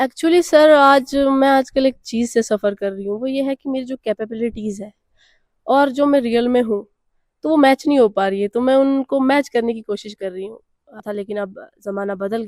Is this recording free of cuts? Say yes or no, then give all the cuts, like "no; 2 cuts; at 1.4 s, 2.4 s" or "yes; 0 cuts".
no; 1 cut; at 11.0 s